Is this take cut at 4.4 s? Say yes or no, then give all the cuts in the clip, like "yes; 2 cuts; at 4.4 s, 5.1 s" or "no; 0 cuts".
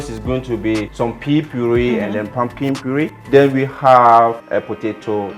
yes; 3 cuts; at 0.9 s, 3.2 s, 4.4 s